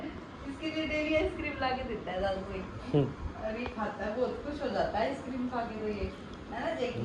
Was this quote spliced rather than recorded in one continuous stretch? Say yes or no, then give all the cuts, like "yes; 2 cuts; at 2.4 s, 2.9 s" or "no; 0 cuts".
no; 0 cuts